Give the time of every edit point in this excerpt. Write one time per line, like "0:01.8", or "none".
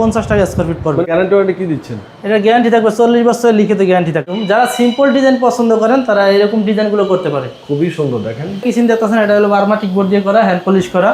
0:01.1
0:04.3
0:08.6